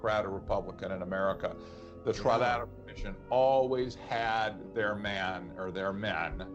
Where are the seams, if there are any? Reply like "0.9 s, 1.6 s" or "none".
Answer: none